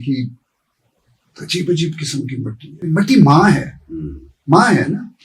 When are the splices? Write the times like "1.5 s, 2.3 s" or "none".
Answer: 2.7 s